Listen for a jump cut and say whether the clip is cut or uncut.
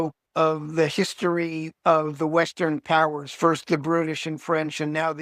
cut